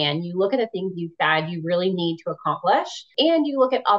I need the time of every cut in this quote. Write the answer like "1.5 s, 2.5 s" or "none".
3.1 s